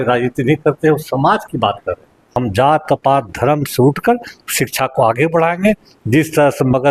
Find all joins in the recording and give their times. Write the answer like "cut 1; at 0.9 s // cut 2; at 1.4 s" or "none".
cut 1; at 2.2 s